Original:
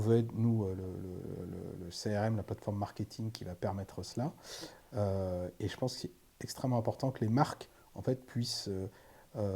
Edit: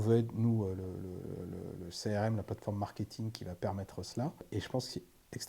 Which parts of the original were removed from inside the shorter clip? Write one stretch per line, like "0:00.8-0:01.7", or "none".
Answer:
0:04.4-0:05.5